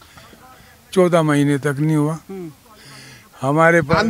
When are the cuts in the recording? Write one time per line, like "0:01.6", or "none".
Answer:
none